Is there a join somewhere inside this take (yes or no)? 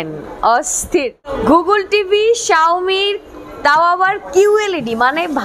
yes